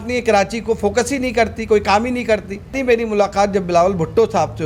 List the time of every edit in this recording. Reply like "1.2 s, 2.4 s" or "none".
2.8 s